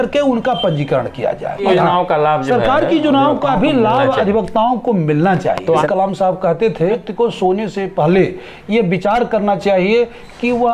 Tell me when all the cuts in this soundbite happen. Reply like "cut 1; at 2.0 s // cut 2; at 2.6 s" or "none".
cut 1; at 1.6 s // cut 2; at 5.9 s // cut 3; at 7.1 s